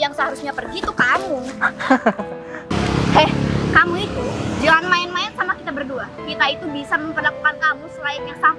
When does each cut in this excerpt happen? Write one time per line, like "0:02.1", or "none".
none